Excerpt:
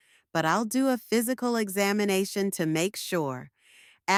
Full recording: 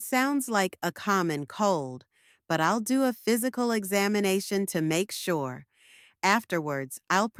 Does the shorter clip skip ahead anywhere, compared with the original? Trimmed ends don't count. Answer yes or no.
no